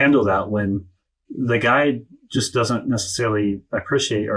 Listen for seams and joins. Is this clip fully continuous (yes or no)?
yes